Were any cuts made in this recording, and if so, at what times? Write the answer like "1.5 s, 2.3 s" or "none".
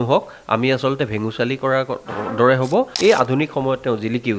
2.9 s